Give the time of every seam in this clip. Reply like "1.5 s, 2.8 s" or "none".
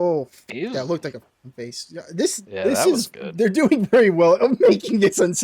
2.4 s